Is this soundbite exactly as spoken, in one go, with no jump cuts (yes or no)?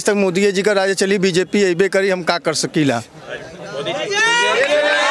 yes